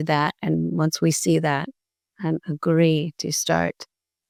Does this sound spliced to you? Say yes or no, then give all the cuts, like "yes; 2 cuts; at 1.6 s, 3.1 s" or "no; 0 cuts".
no; 0 cuts